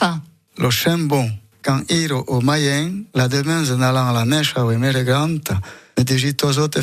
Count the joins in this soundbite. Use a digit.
0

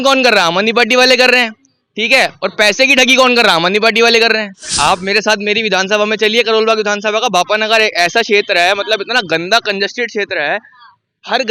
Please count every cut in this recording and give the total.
1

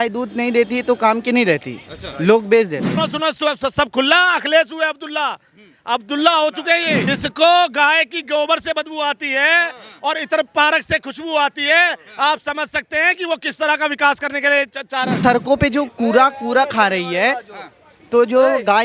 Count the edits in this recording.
3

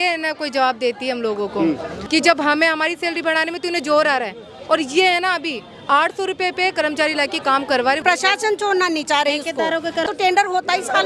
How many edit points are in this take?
3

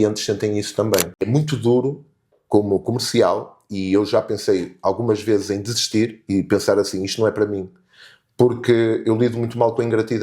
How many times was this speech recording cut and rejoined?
1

